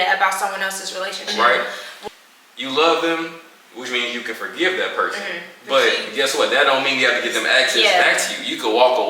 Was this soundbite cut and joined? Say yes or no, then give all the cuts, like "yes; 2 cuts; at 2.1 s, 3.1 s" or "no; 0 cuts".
yes; 1 cut; at 1.2 s